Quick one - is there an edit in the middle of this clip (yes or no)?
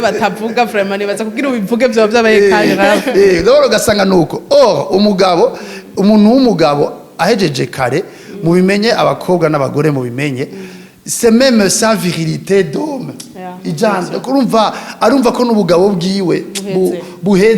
no